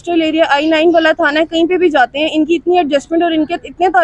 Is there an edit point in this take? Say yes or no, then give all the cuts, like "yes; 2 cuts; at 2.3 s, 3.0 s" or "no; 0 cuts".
no; 0 cuts